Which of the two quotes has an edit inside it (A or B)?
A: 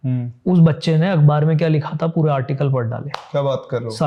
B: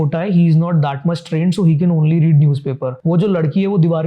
B